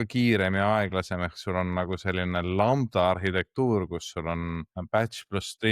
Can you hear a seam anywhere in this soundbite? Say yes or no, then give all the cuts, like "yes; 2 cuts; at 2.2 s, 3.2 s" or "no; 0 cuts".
yes; 1 cut; at 4.8 s